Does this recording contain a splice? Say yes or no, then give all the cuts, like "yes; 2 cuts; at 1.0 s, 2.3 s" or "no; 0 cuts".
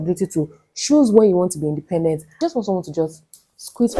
yes; 1 cut; at 2.3 s